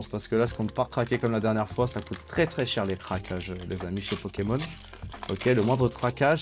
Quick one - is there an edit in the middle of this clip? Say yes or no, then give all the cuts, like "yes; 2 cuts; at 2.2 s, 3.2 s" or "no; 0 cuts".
no; 0 cuts